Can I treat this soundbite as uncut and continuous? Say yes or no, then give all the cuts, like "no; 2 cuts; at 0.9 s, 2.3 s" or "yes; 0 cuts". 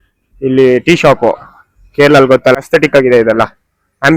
no; 1 cut; at 2.6 s